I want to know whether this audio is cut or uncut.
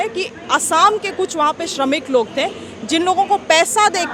uncut